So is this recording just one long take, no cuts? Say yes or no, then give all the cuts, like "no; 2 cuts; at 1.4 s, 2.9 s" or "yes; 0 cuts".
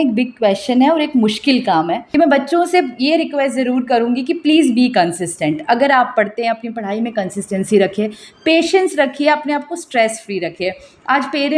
no; 1 cut; at 2.0 s